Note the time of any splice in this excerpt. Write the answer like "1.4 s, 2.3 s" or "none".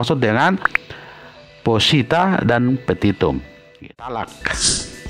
3.8 s